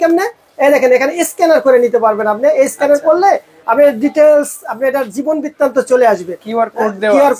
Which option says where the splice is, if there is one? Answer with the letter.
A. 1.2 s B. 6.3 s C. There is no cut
C